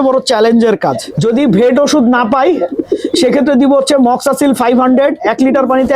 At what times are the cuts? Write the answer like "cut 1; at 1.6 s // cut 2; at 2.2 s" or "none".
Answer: cut 1; at 1.1 s